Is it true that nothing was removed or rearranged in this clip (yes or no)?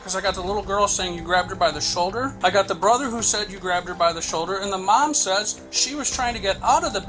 yes